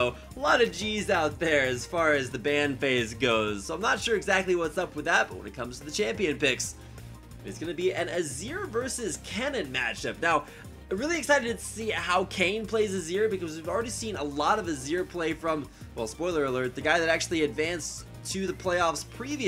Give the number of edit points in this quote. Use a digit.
1